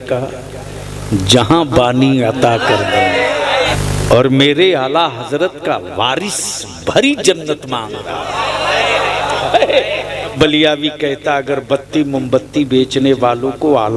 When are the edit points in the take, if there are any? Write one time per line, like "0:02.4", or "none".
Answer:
0:03.7
0:10.3